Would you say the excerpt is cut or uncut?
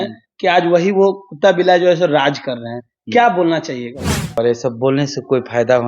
cut